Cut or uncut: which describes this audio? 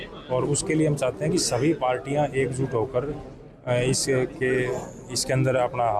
cut